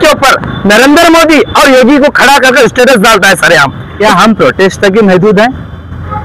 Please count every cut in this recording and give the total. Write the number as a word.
one